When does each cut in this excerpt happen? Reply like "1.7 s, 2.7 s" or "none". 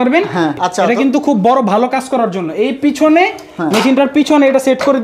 none